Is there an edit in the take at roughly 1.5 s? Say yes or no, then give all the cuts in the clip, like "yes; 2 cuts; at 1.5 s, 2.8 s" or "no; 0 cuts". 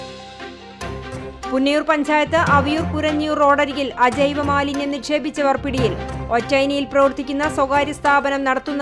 yes; 1 cut; at 1.5 s